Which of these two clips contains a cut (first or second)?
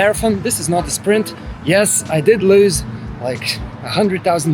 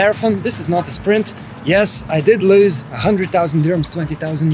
second